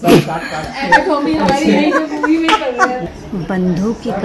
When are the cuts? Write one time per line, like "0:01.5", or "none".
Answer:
0:03.0